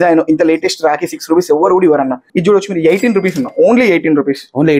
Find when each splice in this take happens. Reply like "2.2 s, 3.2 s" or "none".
2.3 s